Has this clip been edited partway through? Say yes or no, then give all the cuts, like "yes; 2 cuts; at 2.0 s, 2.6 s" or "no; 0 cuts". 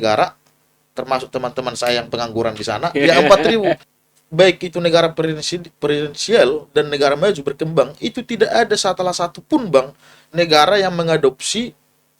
yes; 1 cut; at 3.9 s